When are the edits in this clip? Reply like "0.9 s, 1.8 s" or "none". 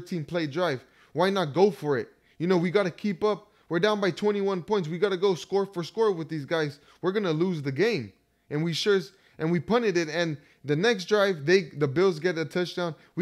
none